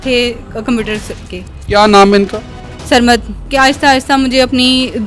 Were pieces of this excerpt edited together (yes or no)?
yes